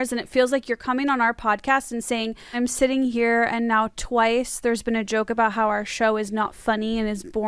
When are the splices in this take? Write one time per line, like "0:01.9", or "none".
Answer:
0:02.6